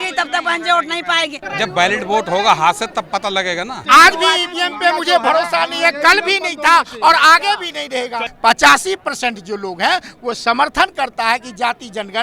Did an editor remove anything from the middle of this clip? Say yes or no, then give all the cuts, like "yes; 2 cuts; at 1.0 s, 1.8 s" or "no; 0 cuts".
yes; 3 cuts; at 1.4 s, 3.8 s, 8.3 s